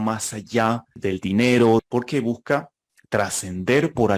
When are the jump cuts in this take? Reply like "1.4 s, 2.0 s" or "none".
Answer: 0.9 s, 1.9 s